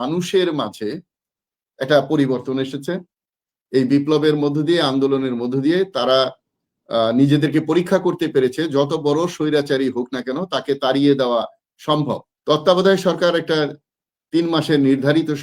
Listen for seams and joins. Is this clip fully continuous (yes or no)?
no